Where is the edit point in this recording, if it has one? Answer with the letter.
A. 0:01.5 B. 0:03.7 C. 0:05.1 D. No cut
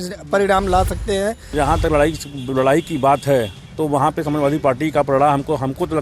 A